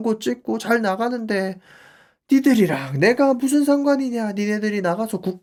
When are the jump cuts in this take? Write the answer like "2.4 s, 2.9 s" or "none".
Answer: none